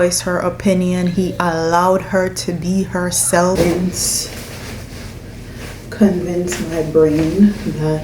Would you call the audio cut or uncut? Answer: cut